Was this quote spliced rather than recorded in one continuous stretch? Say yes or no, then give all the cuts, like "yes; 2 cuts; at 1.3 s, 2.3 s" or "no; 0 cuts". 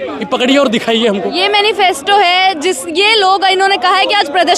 no; 0 cuts